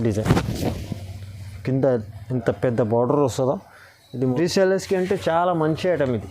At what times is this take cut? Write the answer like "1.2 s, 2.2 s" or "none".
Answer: 4.3 s